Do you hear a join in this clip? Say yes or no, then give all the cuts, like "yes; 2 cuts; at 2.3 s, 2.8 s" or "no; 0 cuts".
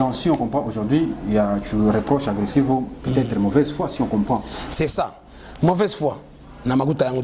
no; 0 cuts